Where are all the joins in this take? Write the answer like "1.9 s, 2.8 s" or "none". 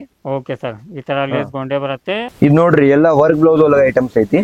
2.3 s